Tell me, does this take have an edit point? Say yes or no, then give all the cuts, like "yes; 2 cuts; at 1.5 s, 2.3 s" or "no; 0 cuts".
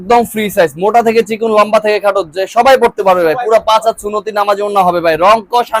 no; 0 cuts